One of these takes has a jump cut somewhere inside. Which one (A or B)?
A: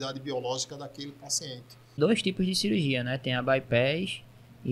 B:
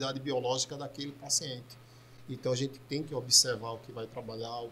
A